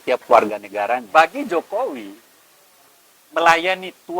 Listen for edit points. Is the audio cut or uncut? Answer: cut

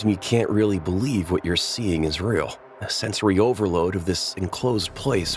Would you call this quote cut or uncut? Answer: uncut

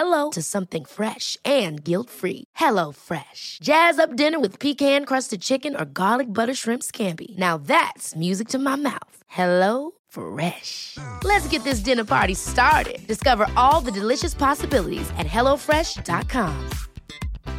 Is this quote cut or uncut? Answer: uncut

